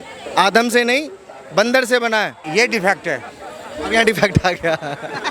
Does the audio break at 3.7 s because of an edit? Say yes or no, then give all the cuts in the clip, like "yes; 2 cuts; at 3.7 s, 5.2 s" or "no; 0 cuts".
no; 1 cut; at 2.4 s